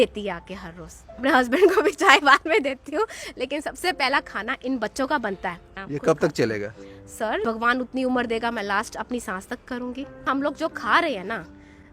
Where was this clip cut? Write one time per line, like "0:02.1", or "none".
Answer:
0:01.2
0:05.7
0:07.4
0:10.2

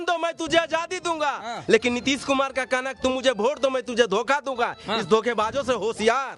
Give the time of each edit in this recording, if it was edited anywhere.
none

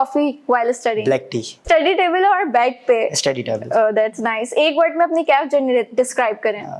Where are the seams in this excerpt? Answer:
0:01.6

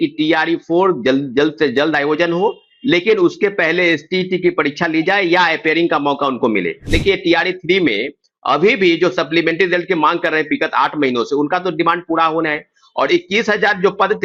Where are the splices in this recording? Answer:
0:06.8

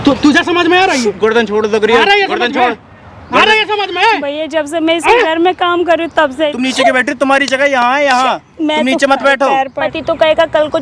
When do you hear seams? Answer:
0:06.3
0:09.9

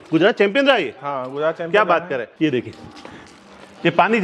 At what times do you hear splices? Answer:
none

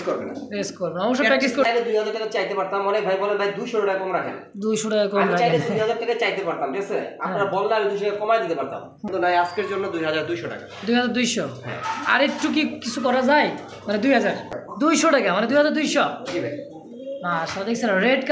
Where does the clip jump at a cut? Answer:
0:01.6
0:09.1
0:14.6

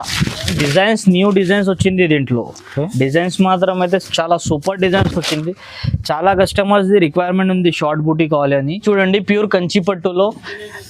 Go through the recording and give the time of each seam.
0:08.7

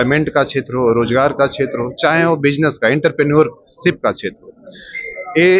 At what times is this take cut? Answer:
none

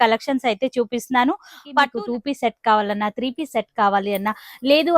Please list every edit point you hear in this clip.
0:01.7

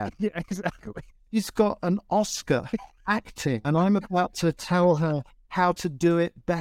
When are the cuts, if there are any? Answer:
0:03.1

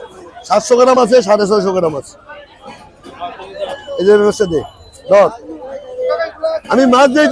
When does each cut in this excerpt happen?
0:03.7

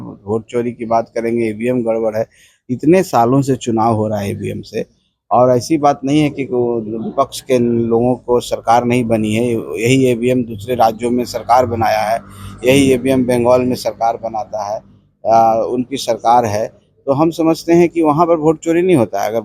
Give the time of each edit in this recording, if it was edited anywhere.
none

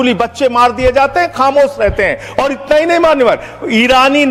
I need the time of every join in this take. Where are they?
none

